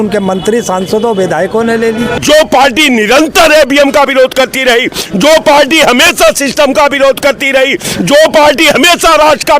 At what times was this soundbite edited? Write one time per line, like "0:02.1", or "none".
0:02.2